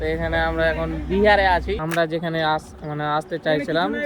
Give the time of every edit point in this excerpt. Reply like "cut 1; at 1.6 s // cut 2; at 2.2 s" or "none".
cut 1; at 1.8 s